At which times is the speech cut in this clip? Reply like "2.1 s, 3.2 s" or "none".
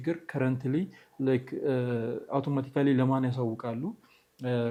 none